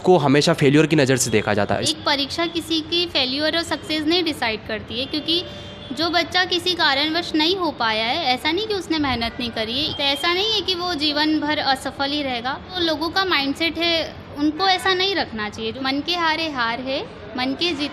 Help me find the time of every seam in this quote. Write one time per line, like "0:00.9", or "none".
0:01.9
0:09.9
0:12.8
0:15.8